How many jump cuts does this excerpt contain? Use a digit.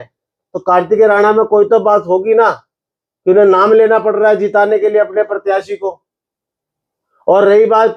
0